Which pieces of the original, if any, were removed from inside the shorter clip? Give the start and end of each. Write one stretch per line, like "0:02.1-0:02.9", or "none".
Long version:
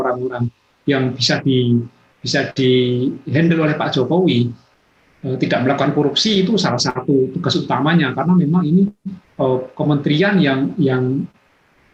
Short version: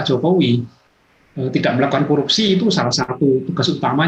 none